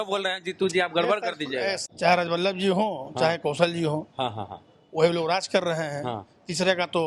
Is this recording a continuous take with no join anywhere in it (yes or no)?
no